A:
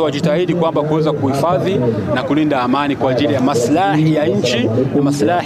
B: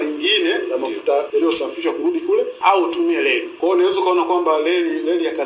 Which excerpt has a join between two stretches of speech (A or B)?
B